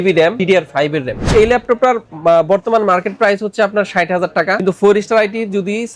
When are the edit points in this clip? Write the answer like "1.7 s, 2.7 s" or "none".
1.2 s